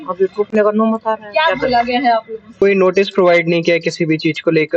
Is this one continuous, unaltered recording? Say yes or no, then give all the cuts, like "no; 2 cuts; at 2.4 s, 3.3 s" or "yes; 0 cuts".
no; 1 cut; at 2.4 s